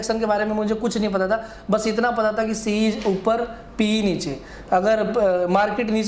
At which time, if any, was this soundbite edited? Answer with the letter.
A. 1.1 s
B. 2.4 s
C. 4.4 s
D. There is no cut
D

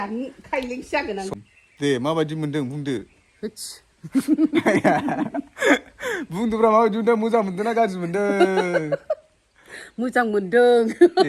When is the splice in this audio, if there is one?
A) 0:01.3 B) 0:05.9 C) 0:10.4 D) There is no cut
A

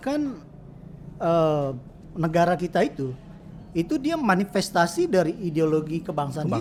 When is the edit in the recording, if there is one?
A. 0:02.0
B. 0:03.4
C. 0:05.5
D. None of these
D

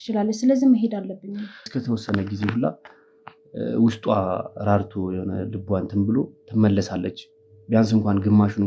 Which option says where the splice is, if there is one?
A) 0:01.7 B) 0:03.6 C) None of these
A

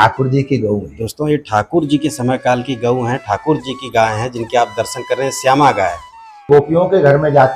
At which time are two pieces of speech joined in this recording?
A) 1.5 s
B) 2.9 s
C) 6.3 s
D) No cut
C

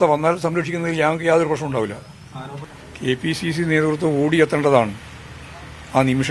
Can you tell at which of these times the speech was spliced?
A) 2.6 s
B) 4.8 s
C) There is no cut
A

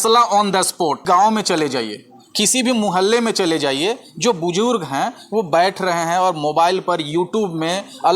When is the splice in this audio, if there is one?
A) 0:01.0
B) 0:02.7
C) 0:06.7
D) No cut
A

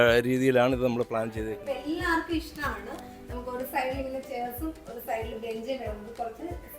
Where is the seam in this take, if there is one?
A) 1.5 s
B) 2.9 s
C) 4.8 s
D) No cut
A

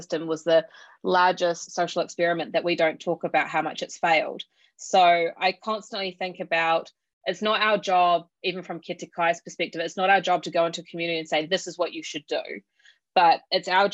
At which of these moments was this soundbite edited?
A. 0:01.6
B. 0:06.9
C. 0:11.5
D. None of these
A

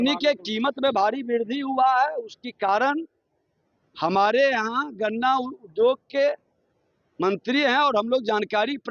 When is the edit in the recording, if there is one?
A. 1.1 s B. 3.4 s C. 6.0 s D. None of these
D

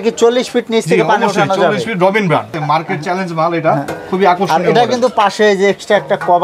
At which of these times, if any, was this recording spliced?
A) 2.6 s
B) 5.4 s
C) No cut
A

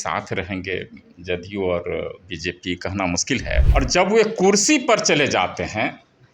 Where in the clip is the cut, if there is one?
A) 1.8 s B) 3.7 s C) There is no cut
B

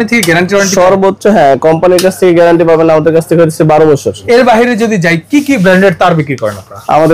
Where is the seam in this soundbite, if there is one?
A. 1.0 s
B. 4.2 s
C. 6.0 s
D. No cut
B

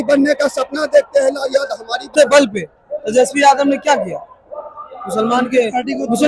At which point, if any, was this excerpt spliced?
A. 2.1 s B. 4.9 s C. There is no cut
A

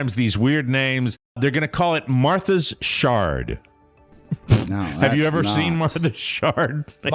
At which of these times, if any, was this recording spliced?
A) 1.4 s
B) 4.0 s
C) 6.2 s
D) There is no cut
A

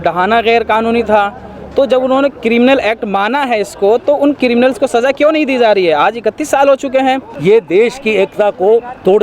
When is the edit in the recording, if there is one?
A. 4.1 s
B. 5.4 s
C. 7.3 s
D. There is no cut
C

